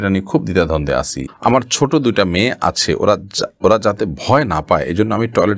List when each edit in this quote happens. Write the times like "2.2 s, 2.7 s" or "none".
1.3 s